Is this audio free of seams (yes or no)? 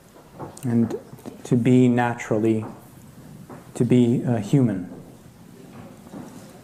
yes